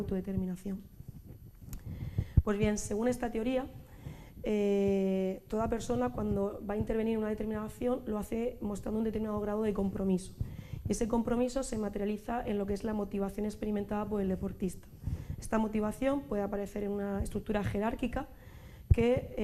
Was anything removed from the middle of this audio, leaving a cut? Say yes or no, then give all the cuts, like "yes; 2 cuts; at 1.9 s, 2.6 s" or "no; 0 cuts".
no; 0 cuts